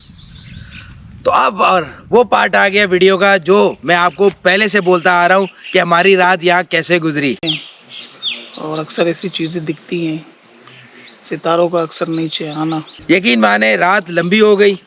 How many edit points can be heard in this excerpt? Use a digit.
2